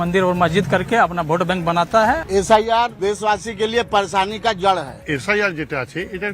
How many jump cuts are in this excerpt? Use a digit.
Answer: 3